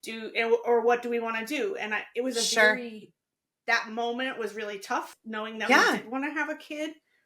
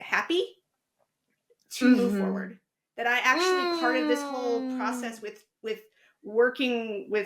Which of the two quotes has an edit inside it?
first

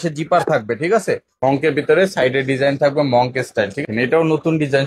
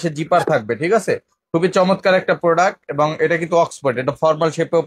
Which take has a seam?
first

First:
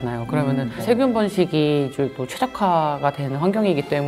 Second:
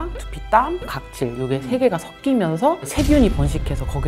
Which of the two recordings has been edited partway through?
second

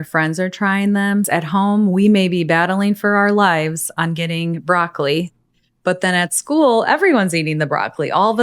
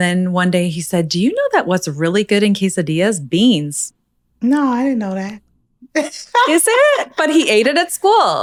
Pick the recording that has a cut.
first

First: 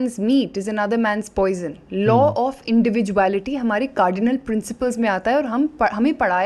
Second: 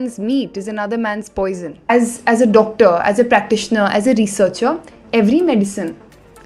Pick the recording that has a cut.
second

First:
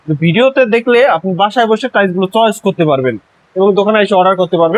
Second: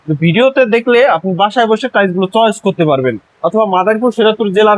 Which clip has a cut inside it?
second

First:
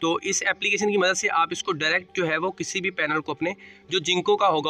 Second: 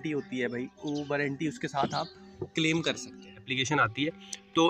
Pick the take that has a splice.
second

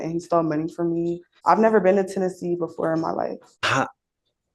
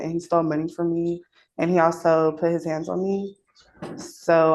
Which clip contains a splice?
first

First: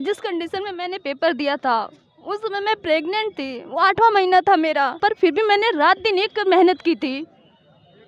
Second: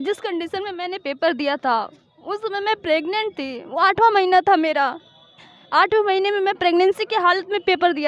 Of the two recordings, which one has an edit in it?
first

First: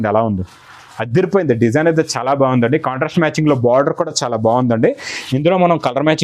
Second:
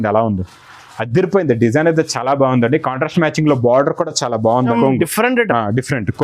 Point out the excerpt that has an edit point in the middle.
second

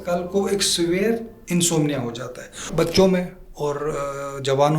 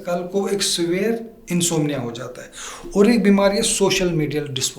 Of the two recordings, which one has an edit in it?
first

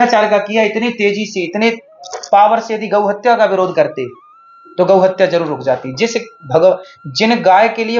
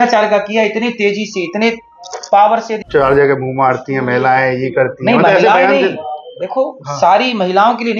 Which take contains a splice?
second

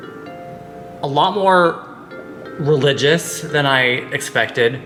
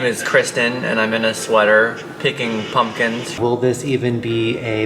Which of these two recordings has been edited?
second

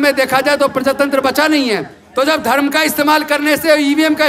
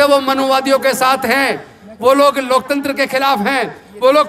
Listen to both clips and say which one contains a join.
first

